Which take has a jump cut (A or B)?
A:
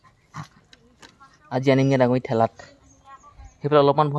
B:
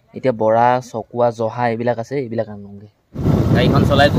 B